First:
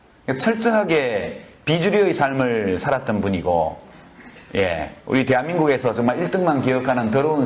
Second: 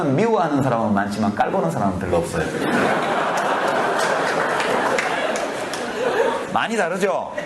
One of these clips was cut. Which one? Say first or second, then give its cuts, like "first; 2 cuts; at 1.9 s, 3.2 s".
second; 1 cut; at 2.8 s